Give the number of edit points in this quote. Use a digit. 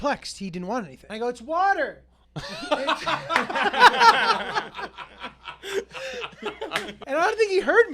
2